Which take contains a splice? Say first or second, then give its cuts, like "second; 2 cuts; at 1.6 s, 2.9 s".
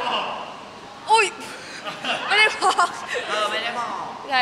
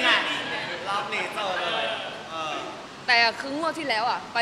second; 1 cut; at 2.9 s